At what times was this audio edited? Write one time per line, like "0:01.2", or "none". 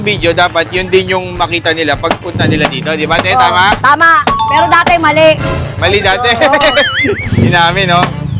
none